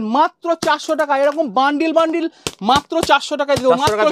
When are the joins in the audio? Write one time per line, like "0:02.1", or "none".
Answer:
none